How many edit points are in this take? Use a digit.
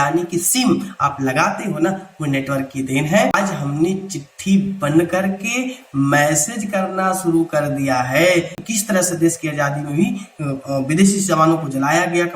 2